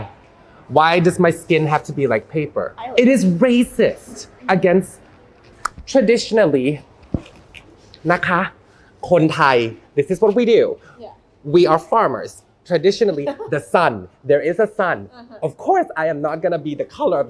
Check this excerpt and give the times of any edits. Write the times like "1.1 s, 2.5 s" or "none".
2.8 s